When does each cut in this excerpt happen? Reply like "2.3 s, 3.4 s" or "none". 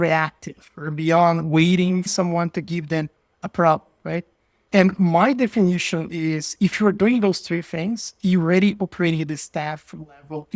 none